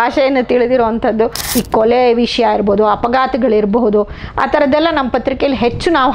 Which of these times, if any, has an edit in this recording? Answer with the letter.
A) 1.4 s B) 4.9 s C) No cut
A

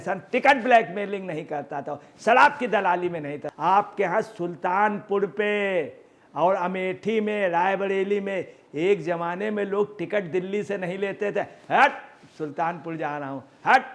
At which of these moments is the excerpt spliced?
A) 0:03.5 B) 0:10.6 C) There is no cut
A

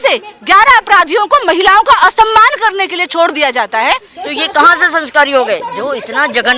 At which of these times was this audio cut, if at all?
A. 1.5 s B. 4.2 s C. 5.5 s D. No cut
B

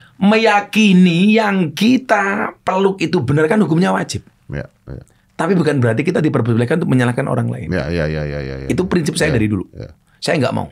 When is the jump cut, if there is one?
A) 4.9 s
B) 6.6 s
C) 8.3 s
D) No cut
D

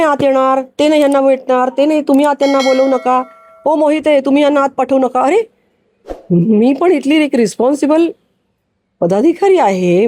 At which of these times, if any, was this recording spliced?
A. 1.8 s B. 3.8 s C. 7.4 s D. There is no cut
D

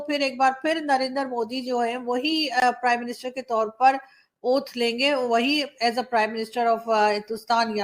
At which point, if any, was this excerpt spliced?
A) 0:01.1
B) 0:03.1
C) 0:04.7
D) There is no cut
D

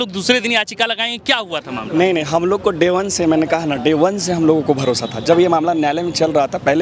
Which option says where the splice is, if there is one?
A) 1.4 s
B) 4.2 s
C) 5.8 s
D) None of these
D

